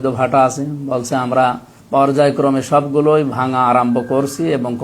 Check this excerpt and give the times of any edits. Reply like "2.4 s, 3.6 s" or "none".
1.7 s